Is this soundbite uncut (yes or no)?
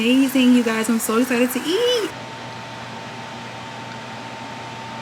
yes